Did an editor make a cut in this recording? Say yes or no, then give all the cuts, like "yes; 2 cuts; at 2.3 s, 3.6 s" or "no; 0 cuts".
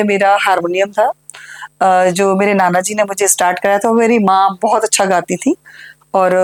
no; 0 cuts